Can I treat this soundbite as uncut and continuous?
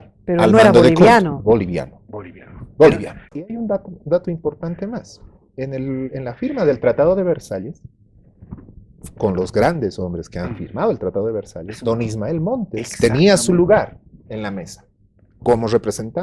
no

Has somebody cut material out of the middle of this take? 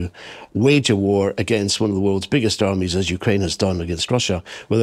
no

